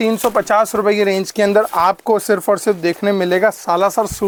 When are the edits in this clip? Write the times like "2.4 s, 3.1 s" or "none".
none